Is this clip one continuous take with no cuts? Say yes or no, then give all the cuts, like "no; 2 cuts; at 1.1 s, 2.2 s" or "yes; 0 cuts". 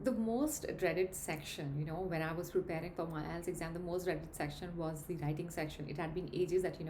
yes; 0 cuts